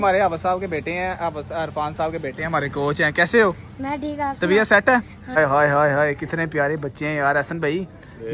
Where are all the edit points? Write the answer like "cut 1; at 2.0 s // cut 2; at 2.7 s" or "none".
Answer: cut 1; at 5.3 s